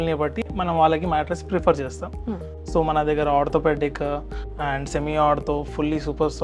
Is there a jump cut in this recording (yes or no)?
no